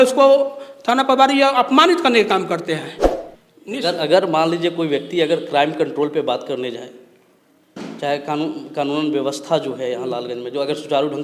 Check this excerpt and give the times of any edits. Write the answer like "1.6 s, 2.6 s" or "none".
3.0 s